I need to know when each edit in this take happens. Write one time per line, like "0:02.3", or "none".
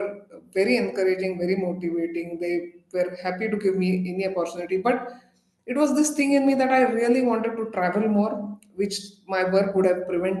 none